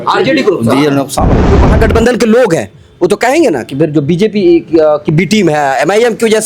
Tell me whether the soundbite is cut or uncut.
cut